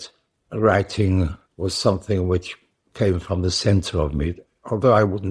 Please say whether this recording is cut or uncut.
cut